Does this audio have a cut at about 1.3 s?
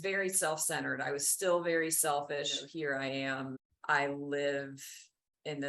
no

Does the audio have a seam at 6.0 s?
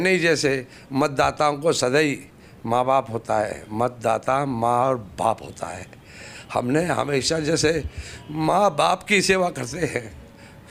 no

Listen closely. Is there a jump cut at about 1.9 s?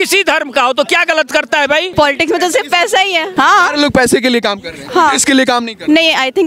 yes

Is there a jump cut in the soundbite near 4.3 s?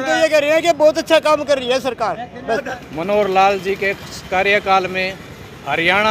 no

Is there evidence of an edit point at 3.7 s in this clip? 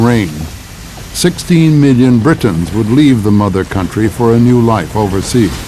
no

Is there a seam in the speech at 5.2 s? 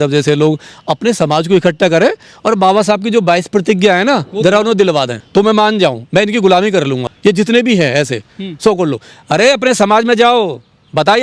yes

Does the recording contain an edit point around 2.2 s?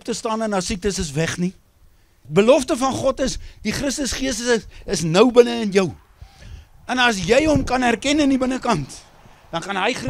yes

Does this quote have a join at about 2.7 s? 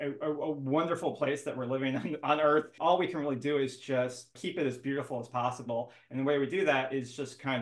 yes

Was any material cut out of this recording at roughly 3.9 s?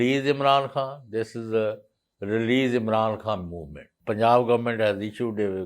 yes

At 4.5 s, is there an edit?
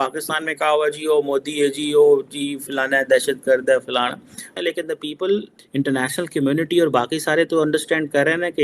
no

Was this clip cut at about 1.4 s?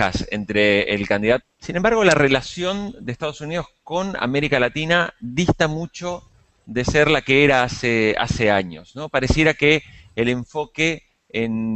no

